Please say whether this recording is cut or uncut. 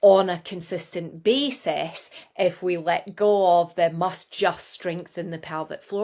uncut